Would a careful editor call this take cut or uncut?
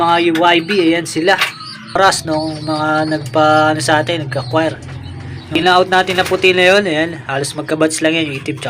cut